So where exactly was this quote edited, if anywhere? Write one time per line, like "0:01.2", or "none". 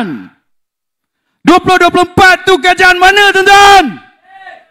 none